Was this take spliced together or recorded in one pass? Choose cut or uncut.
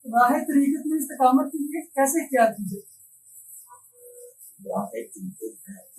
uncut